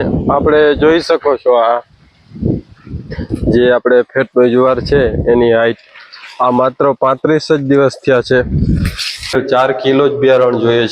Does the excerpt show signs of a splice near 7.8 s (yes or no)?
no